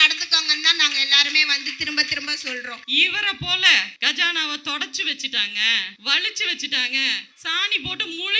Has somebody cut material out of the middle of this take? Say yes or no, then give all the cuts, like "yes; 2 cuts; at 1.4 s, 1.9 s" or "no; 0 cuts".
yes; 4 cuts; at 2.8 s, 3.9 s, 5.9 s, 7.3 s